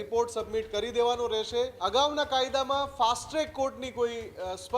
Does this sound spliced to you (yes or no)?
yes